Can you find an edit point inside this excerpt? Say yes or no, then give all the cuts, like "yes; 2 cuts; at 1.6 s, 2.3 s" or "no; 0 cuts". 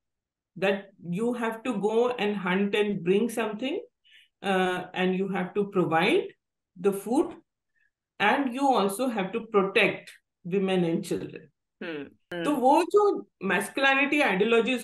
yes; 1 cut; at 12.2 s